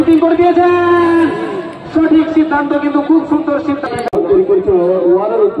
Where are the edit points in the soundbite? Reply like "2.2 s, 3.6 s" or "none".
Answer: 4.1 s